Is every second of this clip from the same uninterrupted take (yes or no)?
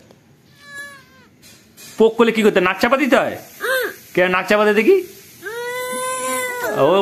yes